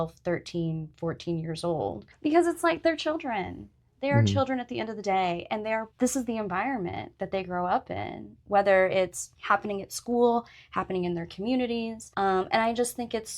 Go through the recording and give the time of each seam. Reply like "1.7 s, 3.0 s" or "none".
2.1 s, 5.9 s, 9.3 s, 12.0 s